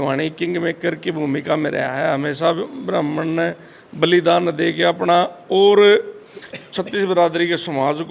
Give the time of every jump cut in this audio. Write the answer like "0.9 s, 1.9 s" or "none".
none